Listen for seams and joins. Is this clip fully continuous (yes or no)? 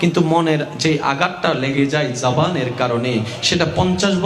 yes